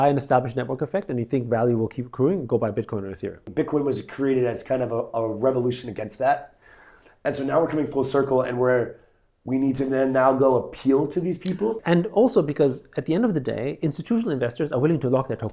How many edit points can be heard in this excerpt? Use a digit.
2